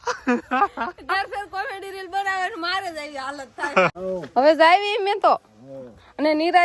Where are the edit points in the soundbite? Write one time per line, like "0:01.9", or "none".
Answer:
0:04.0